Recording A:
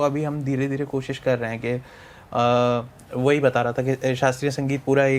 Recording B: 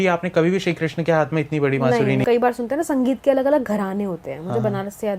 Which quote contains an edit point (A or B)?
B